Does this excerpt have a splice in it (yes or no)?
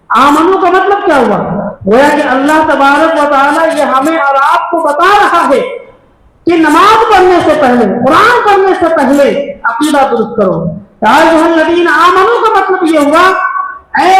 no